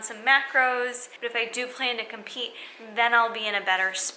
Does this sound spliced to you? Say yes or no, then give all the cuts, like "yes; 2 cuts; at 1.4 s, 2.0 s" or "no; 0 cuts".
yes; 1 cut; at 1.1 s